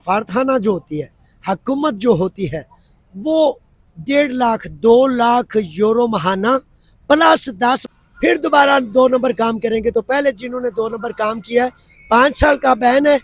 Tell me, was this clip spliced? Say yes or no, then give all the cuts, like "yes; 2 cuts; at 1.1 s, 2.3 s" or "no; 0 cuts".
yes; 1 cut; at 7.9 s